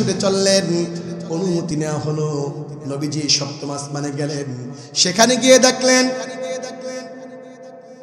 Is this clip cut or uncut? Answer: uncut